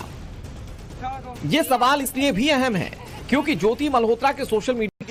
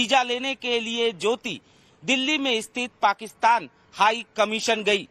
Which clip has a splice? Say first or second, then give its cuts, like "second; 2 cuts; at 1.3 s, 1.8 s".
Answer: second; 1 cut; at 2.1 s